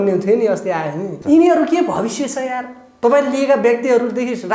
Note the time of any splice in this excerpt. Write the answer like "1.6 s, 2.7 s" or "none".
1.1 s